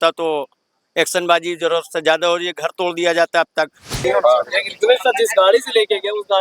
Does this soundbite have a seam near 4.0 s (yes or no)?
yes